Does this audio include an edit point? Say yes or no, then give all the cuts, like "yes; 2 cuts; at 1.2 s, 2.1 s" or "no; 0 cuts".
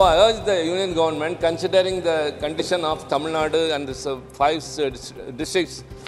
no; 0 cuts